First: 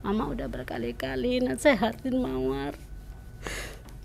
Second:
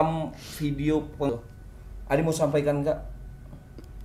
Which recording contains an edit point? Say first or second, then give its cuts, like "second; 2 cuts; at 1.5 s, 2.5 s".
second; 1 cut; at 1.3 s